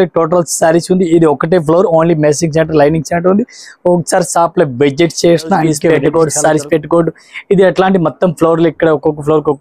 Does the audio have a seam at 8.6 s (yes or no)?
no